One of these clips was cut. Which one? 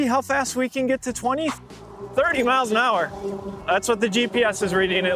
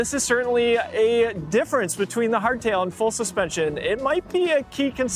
first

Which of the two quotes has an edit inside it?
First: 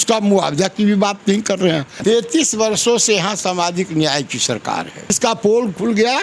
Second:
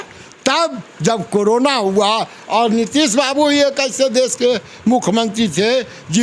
first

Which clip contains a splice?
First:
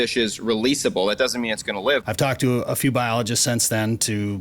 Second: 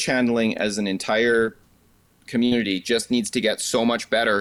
first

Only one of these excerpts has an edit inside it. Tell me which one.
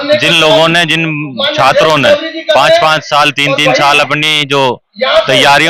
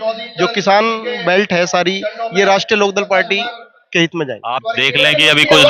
second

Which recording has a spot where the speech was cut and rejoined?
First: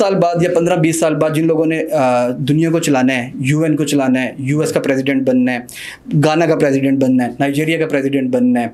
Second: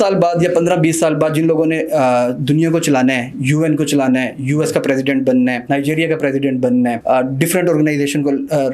second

